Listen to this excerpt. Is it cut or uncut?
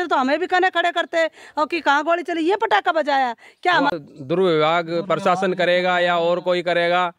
cut